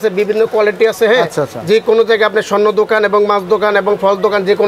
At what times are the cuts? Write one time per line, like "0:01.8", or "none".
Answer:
none